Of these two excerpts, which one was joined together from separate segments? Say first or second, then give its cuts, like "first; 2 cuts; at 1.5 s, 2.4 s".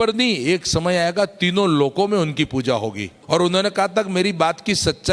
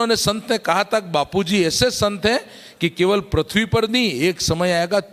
first; 1 cut; at 3.1 s